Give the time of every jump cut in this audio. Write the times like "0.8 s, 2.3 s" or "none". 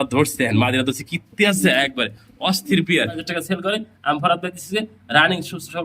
3.3 s